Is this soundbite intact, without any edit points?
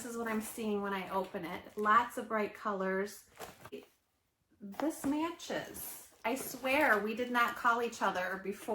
no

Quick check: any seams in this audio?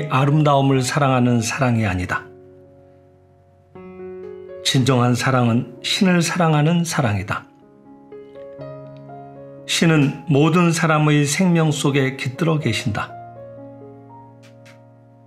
yes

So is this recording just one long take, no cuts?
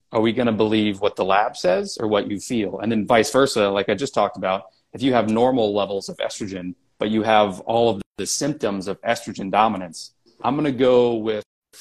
yes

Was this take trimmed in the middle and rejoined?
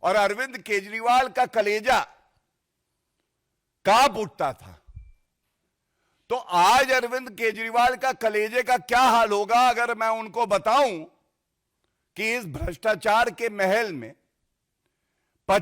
no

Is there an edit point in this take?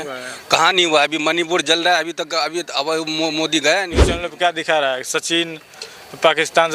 yes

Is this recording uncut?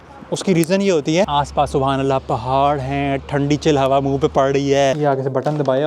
no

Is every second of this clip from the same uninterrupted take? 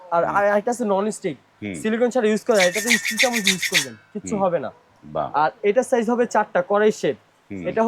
yes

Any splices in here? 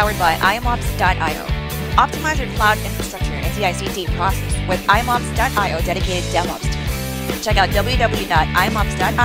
no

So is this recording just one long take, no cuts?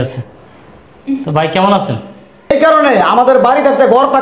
no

